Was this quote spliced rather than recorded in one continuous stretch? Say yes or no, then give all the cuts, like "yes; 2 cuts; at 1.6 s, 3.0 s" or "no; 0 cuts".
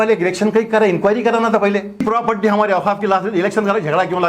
yes; 1 cut; at 2.0 s